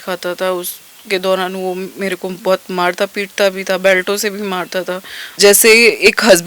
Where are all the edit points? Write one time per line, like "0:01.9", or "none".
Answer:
0:05.3